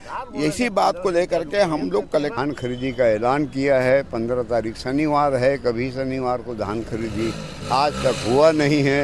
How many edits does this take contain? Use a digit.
1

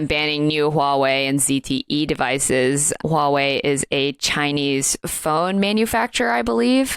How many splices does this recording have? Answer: 1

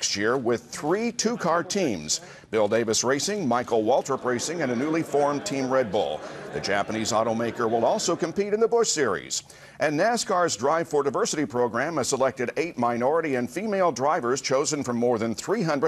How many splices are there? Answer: 0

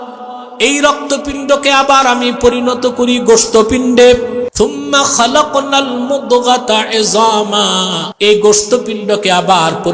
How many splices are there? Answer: 2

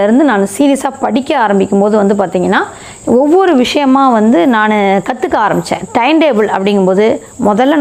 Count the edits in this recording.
0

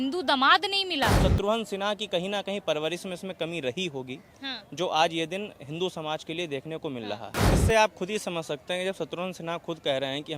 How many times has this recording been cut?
2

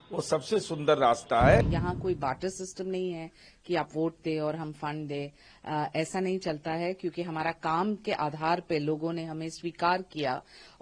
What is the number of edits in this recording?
1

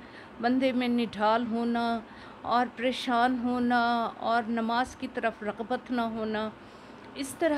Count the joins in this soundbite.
0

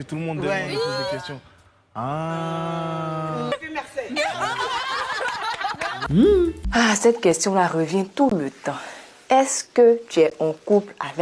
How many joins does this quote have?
0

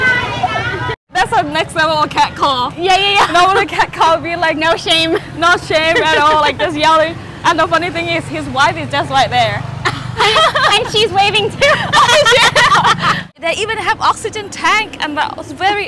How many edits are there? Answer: 2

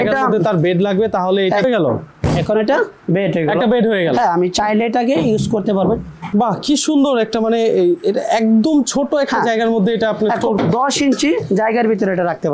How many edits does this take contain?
3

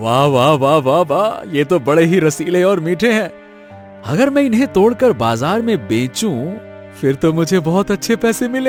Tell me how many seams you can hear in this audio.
0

